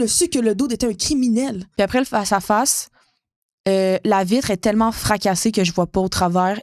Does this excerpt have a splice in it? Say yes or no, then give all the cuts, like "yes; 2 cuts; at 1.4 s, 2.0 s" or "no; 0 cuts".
yes; 1 cut; at 1.6 s